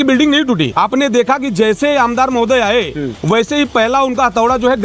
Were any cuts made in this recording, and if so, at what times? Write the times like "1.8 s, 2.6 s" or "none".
none